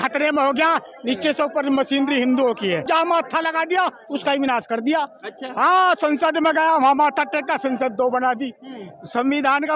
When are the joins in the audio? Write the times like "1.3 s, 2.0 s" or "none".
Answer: 2.9 s

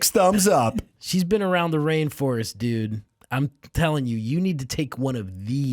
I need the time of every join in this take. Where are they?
0.9 s

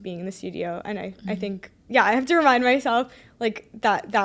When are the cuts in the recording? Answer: none

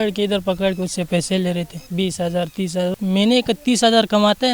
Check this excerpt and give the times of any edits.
1.8 s, 2.9 s

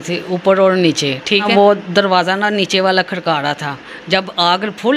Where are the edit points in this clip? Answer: 1.5 s

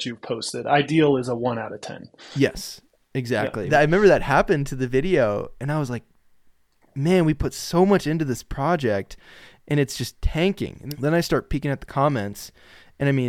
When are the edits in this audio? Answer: 3.6 s, 10.7 s

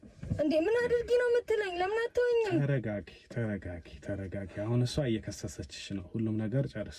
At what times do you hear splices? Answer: none

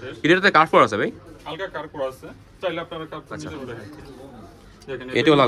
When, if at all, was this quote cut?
3.5 s

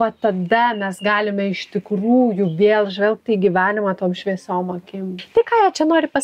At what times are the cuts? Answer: 5.2 s

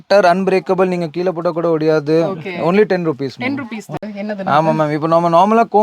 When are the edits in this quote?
3.9 s

